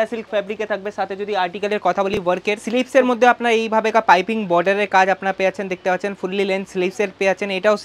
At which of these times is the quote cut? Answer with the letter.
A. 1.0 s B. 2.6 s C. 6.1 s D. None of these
B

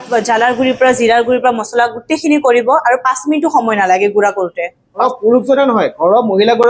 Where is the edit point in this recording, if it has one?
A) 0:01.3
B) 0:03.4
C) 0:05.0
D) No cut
C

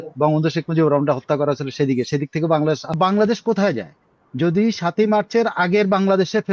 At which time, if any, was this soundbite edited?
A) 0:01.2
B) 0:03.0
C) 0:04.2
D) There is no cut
B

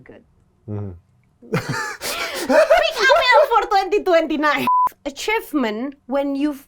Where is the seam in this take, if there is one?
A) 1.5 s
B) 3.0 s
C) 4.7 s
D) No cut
C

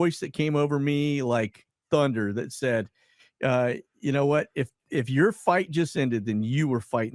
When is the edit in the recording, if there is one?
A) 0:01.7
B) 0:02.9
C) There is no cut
C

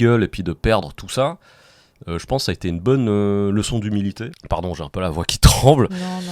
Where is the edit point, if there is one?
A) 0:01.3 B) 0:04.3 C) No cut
B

